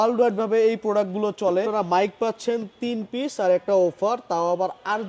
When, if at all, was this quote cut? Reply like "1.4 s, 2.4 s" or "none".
1.7 s